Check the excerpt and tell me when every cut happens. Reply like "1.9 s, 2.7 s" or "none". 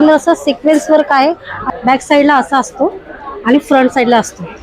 1.5 s